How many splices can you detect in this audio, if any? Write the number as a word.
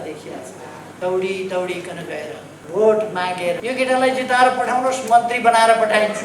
three